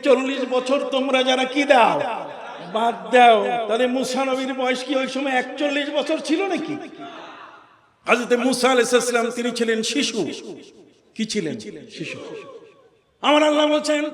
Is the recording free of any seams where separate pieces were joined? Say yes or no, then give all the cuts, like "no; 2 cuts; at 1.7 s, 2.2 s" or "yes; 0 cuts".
yes; 0 cuts